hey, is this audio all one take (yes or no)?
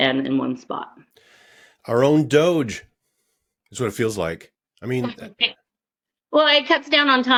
yes